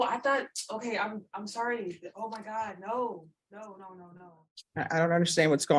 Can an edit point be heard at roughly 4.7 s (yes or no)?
yes